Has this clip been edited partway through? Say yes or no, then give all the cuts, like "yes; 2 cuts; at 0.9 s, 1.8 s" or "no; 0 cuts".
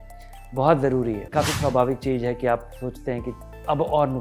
yes; 1 cut; at 1.3 s